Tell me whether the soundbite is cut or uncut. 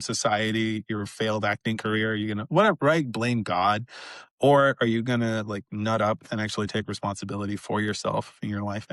uncut